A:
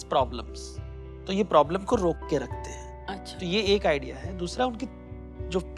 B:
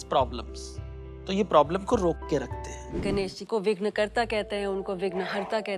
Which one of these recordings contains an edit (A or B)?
B